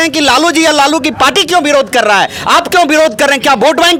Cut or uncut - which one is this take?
uncut